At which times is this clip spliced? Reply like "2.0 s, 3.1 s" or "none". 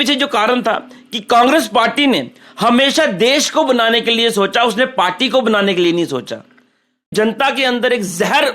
7.1 s